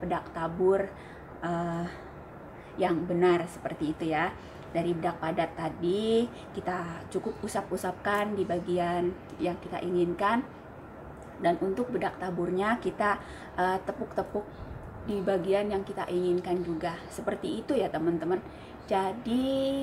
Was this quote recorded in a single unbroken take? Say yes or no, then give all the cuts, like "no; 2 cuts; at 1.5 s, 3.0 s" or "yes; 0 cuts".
yes; 0 cuts